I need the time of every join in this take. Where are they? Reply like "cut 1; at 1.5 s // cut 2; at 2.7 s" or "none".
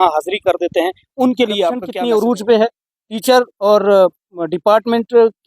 cut 1; at 1.5 s